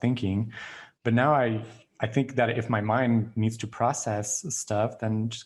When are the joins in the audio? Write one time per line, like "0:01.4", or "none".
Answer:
none